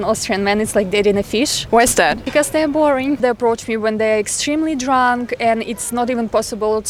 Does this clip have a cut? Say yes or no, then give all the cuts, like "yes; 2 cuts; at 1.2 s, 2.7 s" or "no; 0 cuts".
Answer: no; 0 cuts